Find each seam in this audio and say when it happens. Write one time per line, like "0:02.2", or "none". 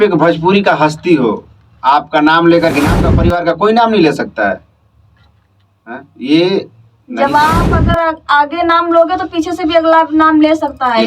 0:02.7